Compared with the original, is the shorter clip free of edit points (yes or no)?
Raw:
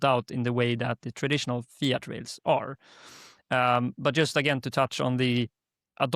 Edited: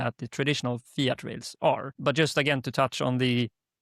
no